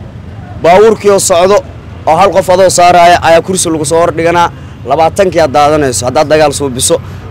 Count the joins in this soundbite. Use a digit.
0